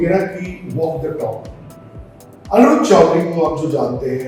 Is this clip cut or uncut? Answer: uncut